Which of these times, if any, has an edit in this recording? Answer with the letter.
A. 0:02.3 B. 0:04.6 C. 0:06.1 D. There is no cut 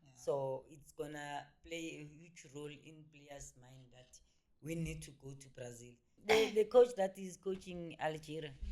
C